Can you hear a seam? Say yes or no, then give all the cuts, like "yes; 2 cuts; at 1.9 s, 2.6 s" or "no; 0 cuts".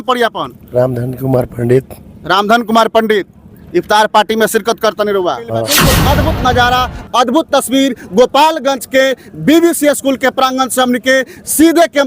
yes; 1 cut; at 5.8 s